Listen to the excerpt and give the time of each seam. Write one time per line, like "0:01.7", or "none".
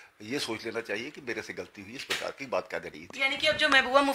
0:03.0